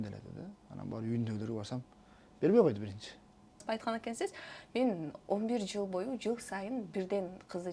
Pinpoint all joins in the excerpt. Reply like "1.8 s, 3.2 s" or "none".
3.6 s

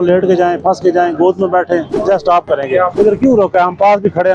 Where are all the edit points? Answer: 1.9 s, 2.9 s

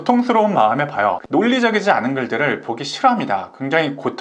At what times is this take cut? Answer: 1.2 s

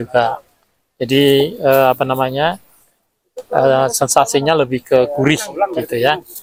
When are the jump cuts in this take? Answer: none

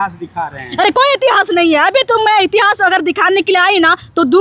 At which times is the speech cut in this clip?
none

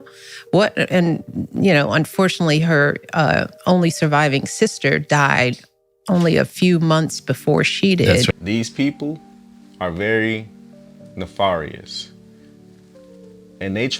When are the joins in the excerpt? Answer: 8.3 s

